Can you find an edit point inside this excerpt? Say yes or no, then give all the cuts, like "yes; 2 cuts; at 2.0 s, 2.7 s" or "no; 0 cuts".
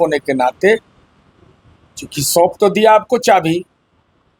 no; 0 cuts